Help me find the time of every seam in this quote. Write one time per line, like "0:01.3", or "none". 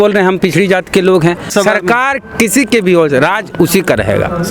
0:01.5